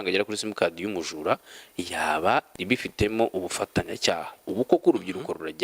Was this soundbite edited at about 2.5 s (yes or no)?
yes